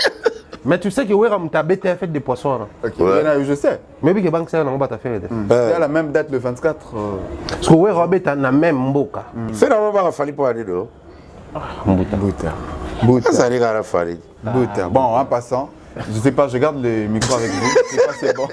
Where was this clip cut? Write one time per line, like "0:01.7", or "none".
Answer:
0:09.5